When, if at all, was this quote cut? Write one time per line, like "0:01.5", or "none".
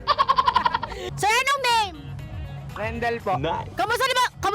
0:01.1